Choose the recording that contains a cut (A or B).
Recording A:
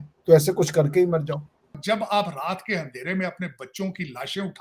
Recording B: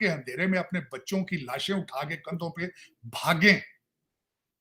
A